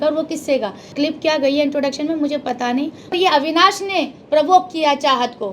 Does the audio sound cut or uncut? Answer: cut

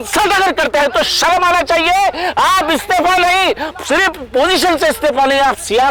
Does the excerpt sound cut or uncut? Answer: uncut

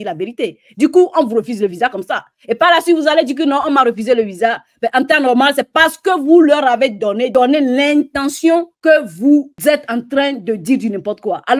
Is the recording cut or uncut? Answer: cut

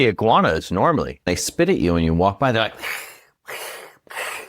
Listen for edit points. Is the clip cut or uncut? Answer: cut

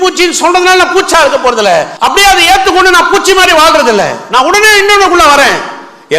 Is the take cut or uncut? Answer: cut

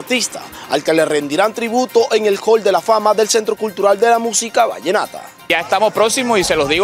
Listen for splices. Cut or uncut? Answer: cut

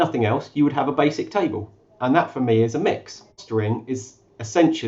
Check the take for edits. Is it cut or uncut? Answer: cut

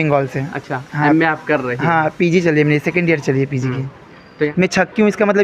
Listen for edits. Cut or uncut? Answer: cut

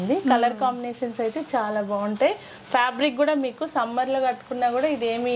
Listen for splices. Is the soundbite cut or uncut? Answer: uncut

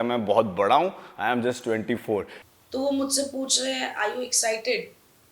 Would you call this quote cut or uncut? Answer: cut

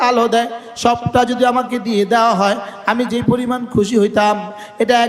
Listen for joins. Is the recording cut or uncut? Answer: uncut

